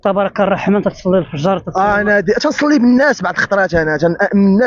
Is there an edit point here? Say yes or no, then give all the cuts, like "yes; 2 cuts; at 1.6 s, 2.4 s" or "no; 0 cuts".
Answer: no; 0 cuts